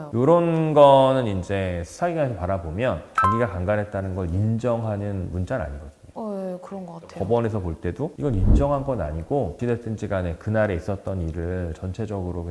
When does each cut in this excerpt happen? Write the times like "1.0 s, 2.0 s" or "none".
none